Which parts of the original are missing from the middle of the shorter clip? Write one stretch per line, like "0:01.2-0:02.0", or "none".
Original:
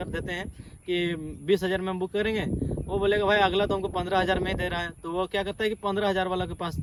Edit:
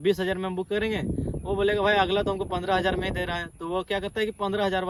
none